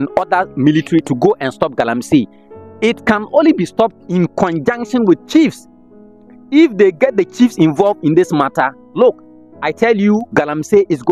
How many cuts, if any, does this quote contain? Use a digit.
0